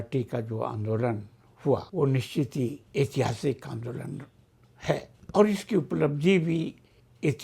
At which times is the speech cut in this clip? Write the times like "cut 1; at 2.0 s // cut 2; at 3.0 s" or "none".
cut 1; at 1.9 s // cut 2; at 2.8 s // cut 3; at 5.2 s